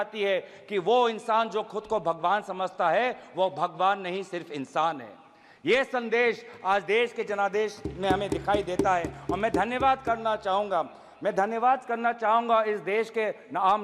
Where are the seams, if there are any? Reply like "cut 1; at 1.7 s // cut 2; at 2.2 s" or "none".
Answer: none